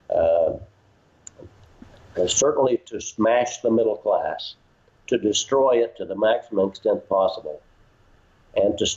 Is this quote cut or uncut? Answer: uncut